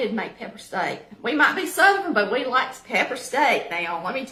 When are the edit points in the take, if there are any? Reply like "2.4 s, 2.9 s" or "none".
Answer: none